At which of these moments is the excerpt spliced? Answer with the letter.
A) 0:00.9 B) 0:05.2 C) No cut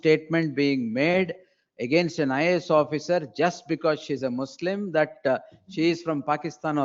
C